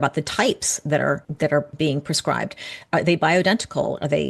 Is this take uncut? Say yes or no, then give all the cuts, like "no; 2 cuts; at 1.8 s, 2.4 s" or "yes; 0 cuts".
no; 1 cut; at 1.3 s